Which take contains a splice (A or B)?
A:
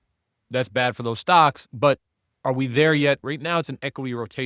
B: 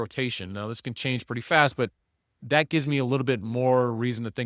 A